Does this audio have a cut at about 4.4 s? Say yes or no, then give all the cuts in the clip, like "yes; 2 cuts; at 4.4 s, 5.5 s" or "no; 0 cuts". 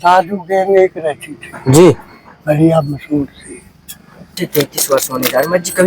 yes; 1 cut; at 4.4 s